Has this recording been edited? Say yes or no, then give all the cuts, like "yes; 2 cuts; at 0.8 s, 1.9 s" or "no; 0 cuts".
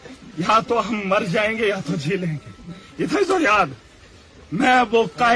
no; 0 cuts